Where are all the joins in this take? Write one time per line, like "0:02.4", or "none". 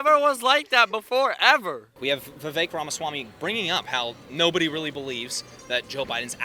0:02.0

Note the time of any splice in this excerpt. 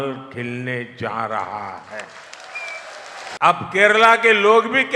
0:03.3

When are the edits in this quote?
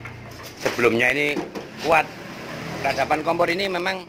none

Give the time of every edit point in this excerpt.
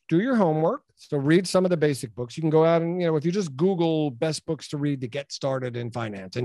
0:00.9

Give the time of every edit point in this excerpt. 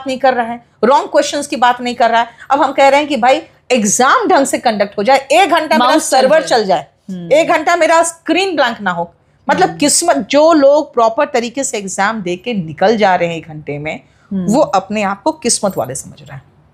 none

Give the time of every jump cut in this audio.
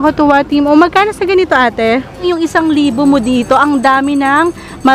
0:02.2

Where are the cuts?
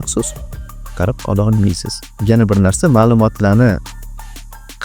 0:02.1

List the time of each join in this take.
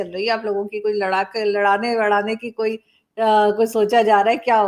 none

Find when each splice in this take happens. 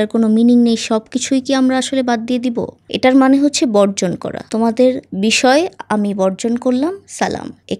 0:02.8

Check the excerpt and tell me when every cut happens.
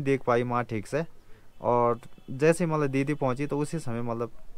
none

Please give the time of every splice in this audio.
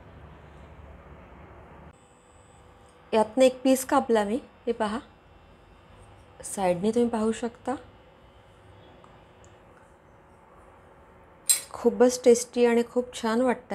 0:01.9

